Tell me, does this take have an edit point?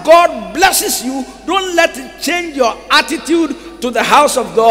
no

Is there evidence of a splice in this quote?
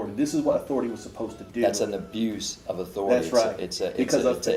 no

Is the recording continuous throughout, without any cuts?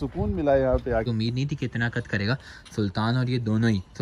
no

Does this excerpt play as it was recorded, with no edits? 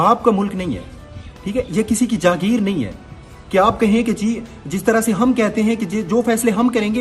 yes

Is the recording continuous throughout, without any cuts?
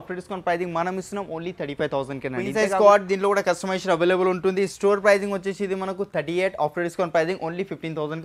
no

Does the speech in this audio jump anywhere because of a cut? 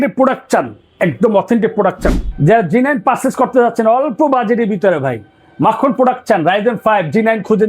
yes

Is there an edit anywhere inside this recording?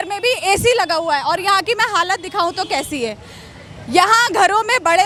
no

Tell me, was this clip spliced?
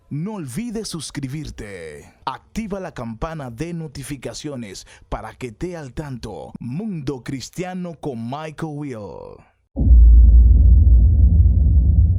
no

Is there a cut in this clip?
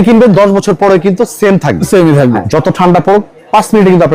yes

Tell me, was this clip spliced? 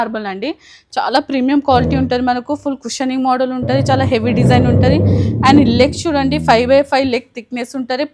no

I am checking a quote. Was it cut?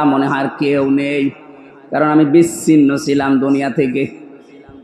no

